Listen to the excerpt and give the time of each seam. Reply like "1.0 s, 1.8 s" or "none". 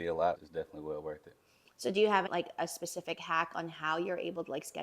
2.3 s

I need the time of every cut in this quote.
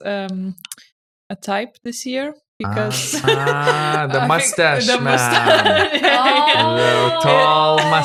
none

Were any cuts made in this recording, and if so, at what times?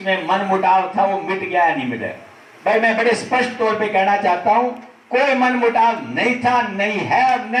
none

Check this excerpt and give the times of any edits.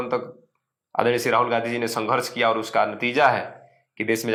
none

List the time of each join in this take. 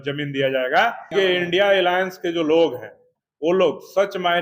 1.1 s, 3.1 s

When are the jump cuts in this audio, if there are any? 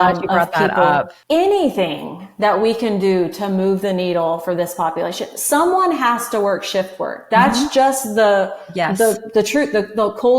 1.2 s

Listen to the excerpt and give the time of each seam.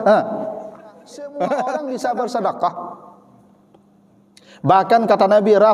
1.8 s

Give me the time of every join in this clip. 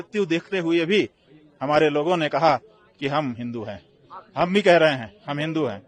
none

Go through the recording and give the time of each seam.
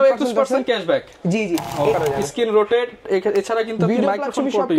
1.9 s

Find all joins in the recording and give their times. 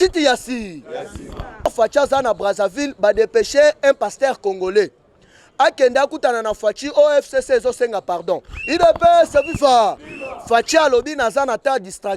1.7 s

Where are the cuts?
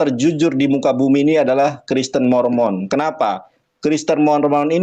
none

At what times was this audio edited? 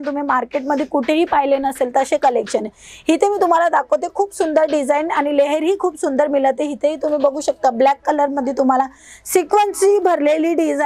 none

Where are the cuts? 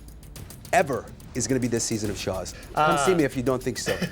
2.5 s

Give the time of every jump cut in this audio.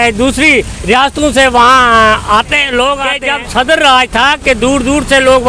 3.2 s

